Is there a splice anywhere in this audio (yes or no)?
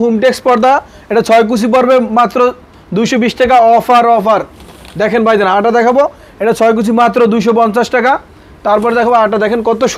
no